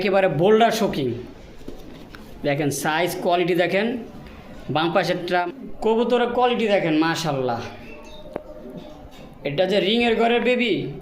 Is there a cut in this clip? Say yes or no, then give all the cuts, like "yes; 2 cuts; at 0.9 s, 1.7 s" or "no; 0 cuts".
yes; 1 cut; at 5.5 s